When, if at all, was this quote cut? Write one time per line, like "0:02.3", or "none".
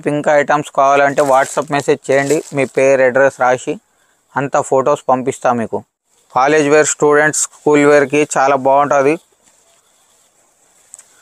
0:05.9